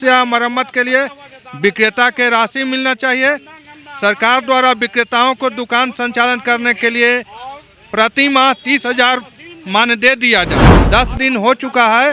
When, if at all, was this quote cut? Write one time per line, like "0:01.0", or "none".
0:10.7